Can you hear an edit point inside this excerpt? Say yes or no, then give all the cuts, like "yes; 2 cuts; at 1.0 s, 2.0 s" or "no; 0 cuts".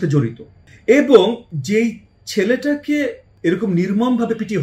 yes; 1 cut; at 3.2 s